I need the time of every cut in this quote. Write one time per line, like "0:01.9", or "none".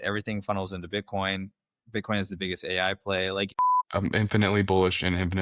0:03.5